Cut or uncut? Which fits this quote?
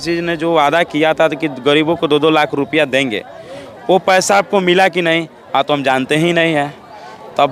uncut